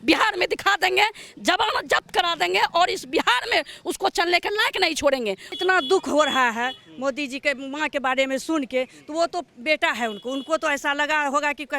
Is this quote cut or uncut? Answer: cut